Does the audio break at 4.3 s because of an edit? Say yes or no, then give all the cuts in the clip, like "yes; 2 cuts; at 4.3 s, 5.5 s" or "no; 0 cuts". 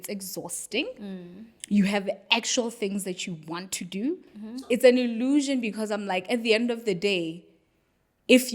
yes; 1 cut; at 4.3 s